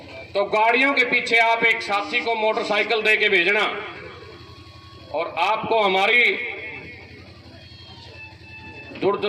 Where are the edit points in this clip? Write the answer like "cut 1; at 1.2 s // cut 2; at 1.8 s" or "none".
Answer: none